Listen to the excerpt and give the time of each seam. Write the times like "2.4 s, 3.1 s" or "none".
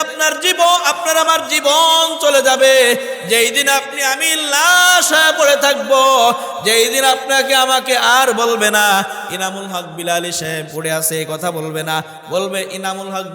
10.7 s